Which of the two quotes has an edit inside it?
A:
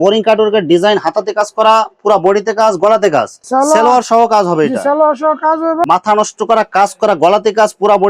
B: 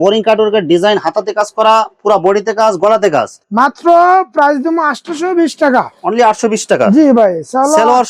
A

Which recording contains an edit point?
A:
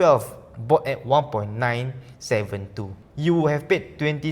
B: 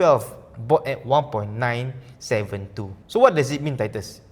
A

